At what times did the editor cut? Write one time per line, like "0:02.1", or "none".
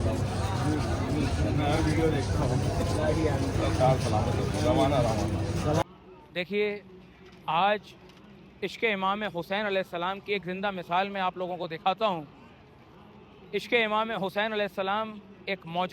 0:05.8